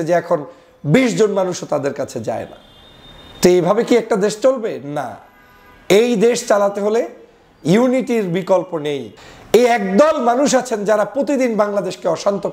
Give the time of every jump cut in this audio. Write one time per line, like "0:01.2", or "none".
0:09.1